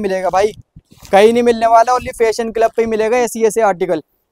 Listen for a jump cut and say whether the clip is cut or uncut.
uncut